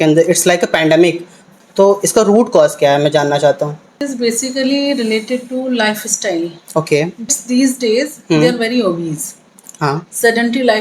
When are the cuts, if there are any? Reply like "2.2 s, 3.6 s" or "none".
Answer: 1.5 s, 3.9 s, 7.3 s